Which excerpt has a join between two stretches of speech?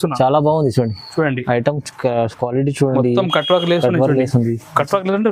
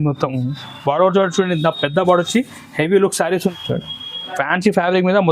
second; 1 cut; at 3.5 s

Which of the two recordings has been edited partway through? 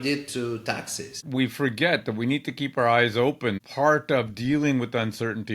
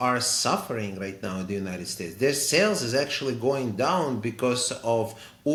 first; 2 cuts; at 1.2 s, 3.6 s

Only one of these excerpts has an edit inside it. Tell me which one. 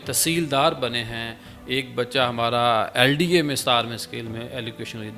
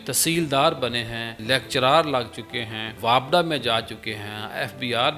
second; 2 cuts; at 1.4 s, 3.0 s

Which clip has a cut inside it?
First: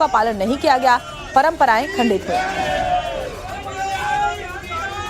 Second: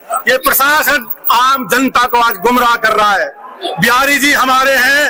first; 1 cut; at 1.4 s

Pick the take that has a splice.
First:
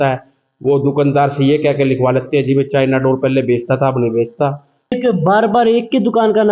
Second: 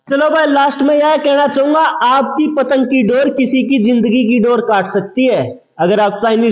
first; 1 cut; at 4.9 s

